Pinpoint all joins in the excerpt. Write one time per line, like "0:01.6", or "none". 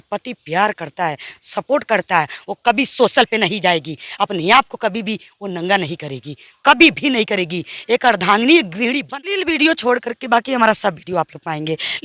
0:09.4